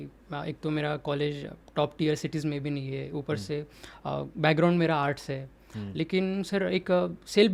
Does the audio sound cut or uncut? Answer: uncut